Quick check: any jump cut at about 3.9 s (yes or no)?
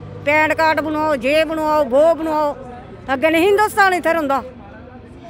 no